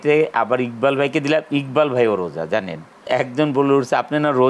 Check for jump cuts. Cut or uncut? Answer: cut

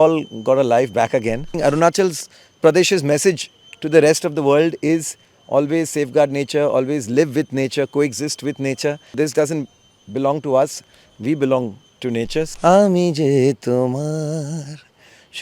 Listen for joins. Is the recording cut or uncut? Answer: cut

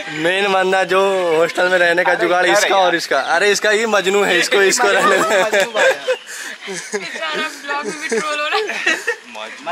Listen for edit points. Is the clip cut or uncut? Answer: uncut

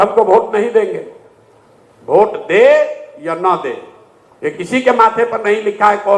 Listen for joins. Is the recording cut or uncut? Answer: uncut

